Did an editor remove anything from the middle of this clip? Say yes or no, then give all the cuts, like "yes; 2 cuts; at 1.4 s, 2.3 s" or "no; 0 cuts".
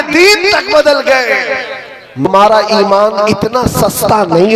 yes; 1 cut; at 2.3 s